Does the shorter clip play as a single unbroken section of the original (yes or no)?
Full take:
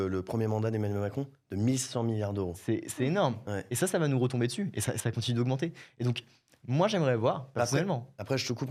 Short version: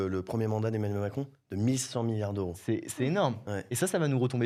yes